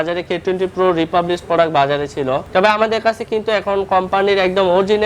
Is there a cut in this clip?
yes; 1 cut; at 2.4 s

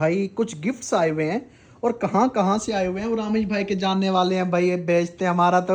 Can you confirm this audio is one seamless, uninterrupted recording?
yes; 0 cuts

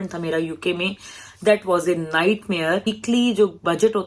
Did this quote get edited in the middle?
yes; 1 cut; at 2.9 s

